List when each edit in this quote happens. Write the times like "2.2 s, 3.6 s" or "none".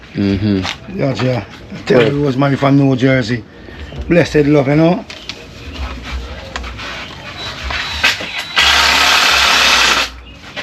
none